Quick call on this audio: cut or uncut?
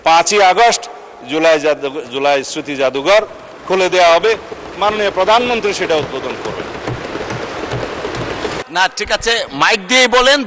cut